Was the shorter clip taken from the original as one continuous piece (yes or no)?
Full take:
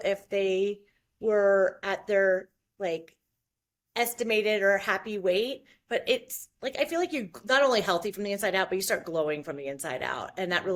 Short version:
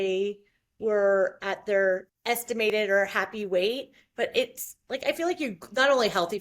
no